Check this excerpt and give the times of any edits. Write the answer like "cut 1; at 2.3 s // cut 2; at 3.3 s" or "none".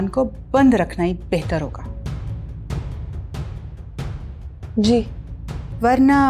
none